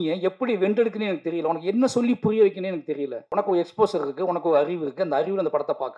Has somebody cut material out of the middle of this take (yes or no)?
yes